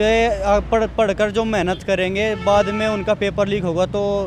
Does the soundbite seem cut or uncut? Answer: uncut